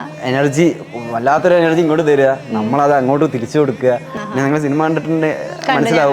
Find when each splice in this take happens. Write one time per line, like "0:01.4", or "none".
0:04.1